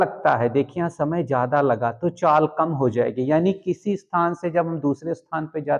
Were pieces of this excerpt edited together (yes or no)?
no